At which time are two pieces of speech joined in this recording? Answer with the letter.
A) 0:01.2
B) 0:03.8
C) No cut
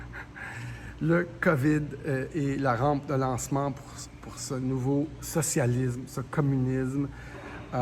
C